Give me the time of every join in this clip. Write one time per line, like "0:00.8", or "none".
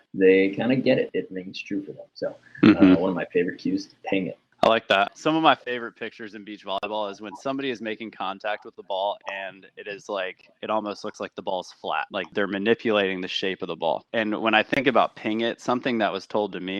0:05.1